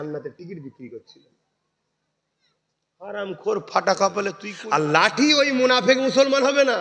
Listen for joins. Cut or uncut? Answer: cut